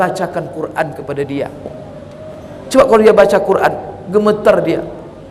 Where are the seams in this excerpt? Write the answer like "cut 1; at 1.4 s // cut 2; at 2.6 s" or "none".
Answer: none